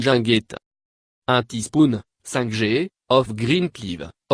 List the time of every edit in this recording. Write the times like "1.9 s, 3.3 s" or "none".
1.4 s